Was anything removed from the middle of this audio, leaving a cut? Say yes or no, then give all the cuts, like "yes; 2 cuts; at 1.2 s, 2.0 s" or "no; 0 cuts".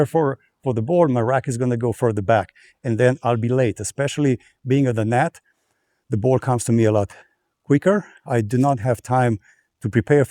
no; 0 cuts